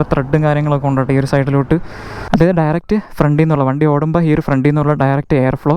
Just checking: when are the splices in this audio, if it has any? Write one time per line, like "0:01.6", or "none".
0:02.3